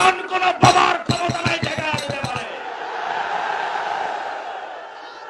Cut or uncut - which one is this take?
uncut